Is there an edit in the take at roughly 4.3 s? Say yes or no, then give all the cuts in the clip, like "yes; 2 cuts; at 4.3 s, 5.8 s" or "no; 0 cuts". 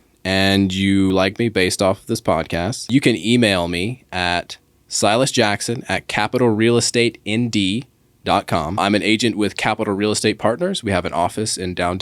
no; 3 cuts; at 1.1 s, 2.9 s, 8.8 s